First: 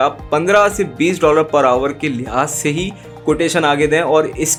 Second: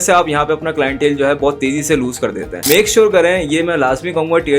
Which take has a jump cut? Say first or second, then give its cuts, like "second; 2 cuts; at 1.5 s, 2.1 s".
second; 1 cut; at 2.6 s